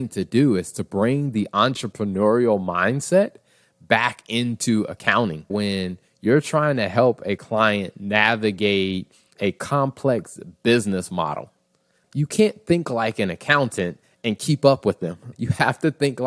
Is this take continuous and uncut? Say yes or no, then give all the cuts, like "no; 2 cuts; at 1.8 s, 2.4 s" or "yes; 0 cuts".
no; 4 cuts; at 5.5 s, 9.3 s, 12.0 s, 15.3 s